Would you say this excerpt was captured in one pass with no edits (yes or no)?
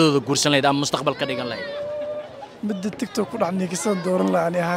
yes